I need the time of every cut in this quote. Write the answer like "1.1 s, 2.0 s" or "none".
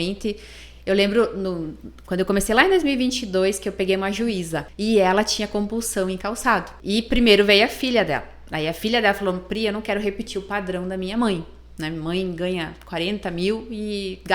4.6 s, 6.7 s